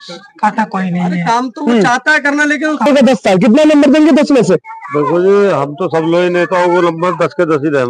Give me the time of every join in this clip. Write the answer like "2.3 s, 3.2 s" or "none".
2.9 s

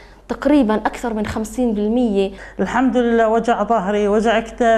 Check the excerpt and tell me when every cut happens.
2.4 s

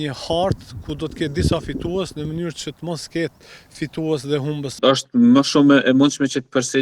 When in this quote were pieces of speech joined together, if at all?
4.8 s

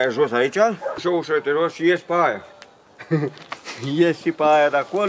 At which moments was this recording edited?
1.0 s

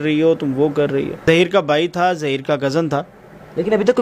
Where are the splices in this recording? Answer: 1.2 s

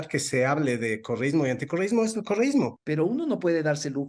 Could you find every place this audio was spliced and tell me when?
2.8 s

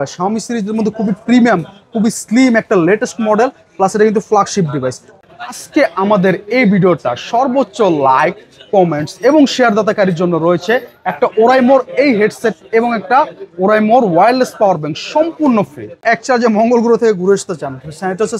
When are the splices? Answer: 5.1 s, 16.0 s

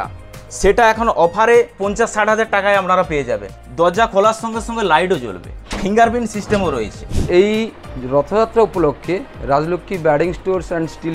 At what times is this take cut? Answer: 1.8 s, 3.5 s, 5.5 s, 7.2 s

